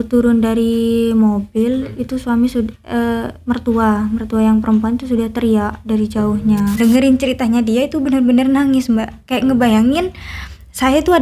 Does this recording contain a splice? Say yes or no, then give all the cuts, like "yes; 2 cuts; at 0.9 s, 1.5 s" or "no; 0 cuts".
yes; 1 cut; at 6.7 s